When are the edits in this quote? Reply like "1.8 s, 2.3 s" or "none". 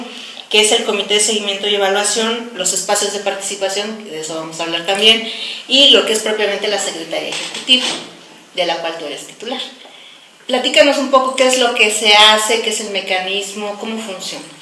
none